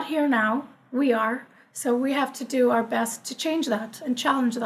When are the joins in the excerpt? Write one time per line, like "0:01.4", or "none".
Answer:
none